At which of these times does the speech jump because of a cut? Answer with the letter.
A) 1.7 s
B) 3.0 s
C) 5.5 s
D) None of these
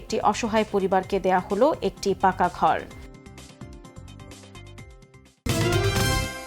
C